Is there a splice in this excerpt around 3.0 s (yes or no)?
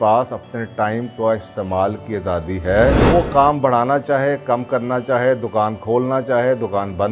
yes